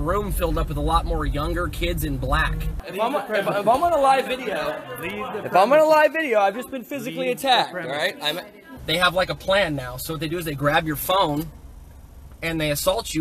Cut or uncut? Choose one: cut